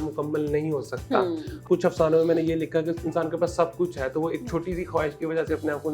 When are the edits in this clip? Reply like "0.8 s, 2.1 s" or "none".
1.6 s